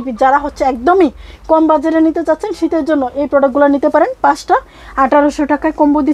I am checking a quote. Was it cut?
no; 0 cuts

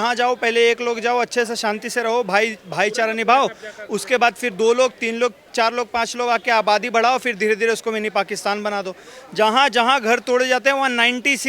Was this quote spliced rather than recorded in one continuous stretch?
no; 0 cuts

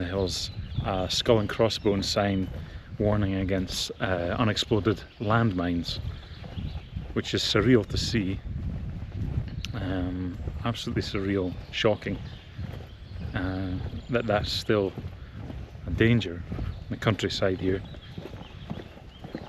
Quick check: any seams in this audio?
no; 0 cuts

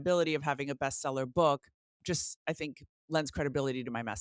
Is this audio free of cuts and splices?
yes; 0 cuts

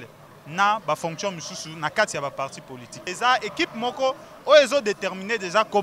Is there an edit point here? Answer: yes; 1 cut; at 3.0 s

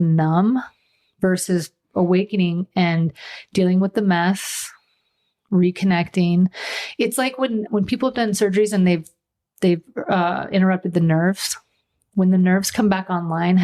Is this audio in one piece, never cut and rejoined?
yes; 0 cuts

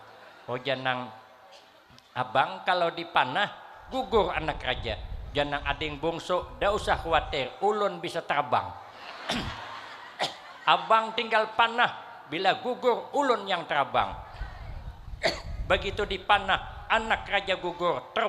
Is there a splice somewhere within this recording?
no; 0 cuts

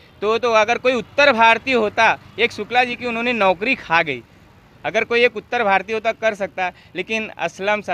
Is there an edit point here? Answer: no; 0 cuts

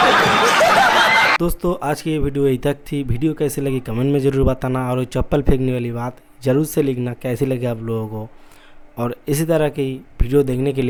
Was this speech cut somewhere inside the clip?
no; 0 cuts

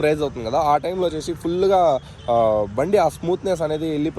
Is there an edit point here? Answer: no; 0 cuts

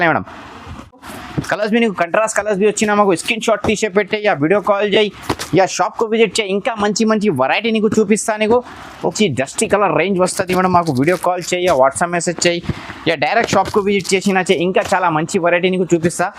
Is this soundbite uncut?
no; 2 cuts; at 1.0 s, 9.1 s

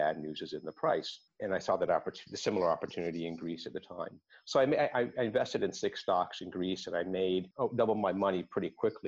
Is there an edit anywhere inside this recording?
yes; 1 cut; at 1.2 s

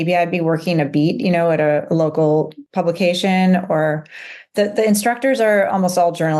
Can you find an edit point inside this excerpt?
yes; 1 cut; at 2.6 s

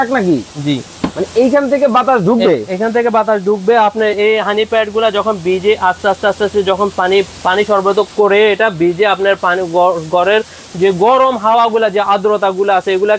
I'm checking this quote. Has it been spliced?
no; 0 cuts

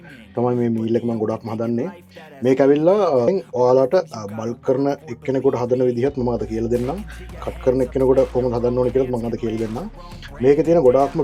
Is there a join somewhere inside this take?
no; 0 cuts

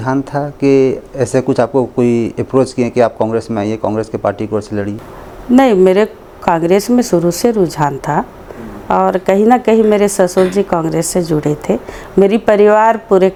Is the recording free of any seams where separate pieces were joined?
yes; 0 cuts

